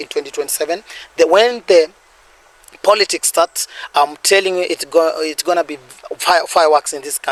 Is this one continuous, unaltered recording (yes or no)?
yes